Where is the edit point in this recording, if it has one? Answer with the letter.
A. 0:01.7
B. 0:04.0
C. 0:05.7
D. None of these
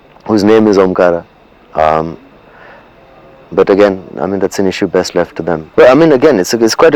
C